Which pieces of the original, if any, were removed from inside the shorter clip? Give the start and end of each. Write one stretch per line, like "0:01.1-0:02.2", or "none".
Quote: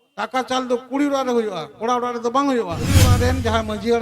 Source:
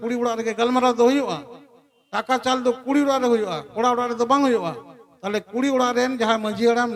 0:05.0-0:05.8